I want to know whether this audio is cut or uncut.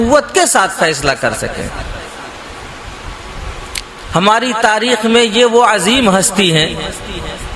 uncut